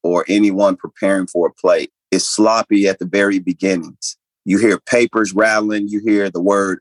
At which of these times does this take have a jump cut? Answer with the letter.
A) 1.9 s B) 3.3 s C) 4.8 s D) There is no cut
A